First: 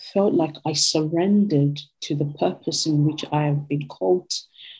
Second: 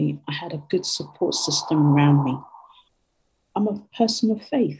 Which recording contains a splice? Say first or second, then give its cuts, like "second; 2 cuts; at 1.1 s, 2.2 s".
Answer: second; 1 cut; at 3.2 s